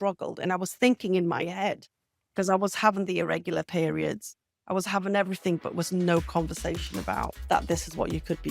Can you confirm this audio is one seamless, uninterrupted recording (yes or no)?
no